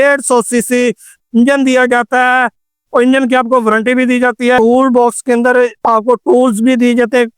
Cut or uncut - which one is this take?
cut